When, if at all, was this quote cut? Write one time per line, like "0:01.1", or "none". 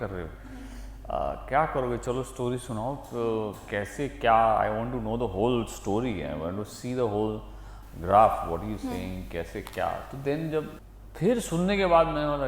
0:10.8